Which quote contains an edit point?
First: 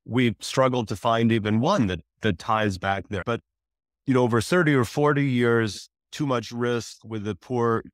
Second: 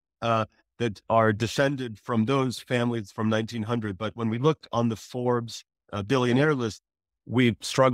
first; 2 cuts; at 3.2 s, 6.0 s

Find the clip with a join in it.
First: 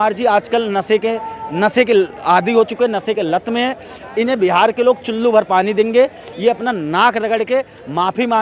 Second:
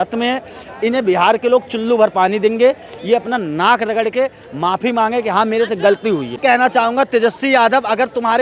second; 1 cut; at 6.4 s

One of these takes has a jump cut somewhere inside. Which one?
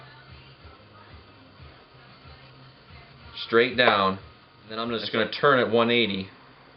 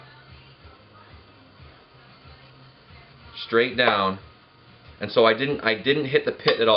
first; 1 cut; at 4.9 s

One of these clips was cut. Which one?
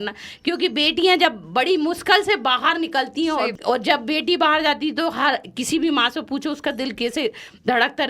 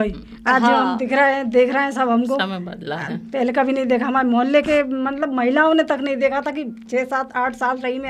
first; 1 cut; at 3.5 s

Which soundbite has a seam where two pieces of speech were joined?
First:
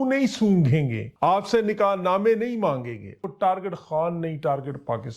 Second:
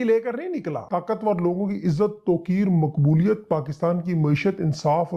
first; 1 cut; at 3.2 s

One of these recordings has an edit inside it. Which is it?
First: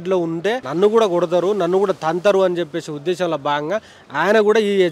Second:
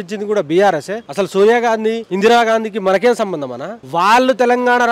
second; 1 cut; at 1.1 s

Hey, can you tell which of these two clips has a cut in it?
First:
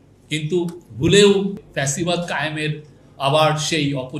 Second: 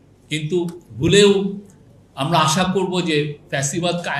first; 1 cut; at 1.7 s

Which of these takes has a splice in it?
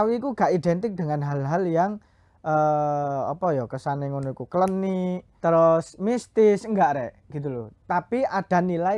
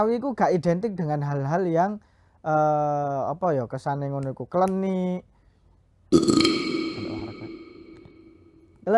first; 1 cut; at 5.3 s

